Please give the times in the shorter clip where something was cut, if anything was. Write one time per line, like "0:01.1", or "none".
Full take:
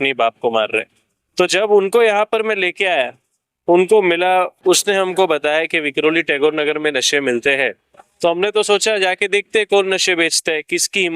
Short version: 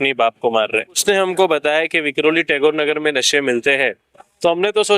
0:01.0